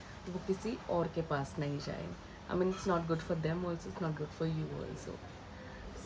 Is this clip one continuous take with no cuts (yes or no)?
yes